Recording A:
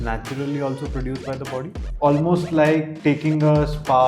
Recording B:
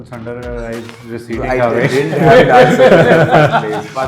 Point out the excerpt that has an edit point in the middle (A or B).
A